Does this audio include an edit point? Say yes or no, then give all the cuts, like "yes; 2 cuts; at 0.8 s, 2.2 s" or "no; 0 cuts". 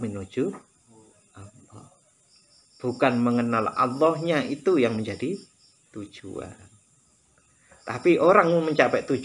no; 0 cuts